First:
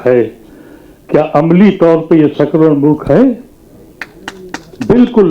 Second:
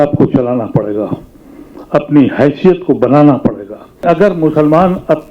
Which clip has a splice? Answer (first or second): second